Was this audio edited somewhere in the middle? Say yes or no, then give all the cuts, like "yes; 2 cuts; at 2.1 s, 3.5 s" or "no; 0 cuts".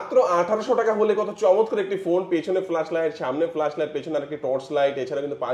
no; 0 cuts